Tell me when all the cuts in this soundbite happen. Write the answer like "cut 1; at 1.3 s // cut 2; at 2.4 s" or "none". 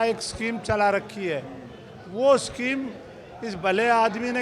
none